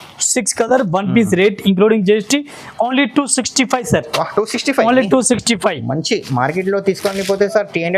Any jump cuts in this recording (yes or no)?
no